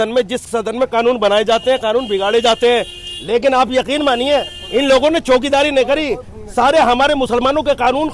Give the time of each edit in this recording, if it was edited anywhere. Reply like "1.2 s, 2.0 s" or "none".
none